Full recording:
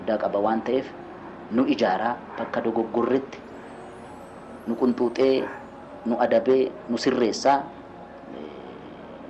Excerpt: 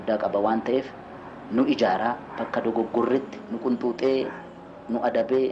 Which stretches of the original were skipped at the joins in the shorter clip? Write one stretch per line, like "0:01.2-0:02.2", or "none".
0:03.4-0:04.6

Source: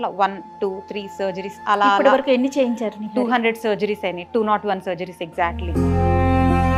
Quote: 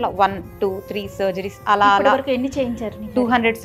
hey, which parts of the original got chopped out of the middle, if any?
none

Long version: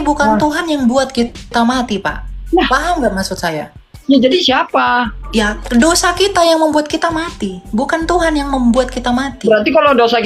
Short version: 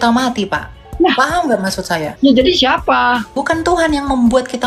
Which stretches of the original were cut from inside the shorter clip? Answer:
0:03.6-0:04.0
0:05.2-0:07.8

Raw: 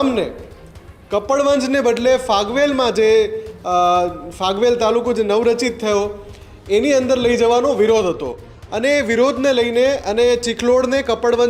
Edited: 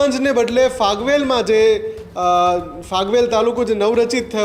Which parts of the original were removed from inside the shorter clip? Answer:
none

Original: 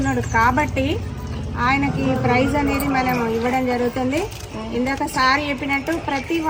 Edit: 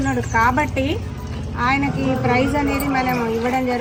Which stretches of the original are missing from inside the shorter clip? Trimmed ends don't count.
none

